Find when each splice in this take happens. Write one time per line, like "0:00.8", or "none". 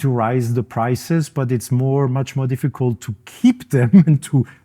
none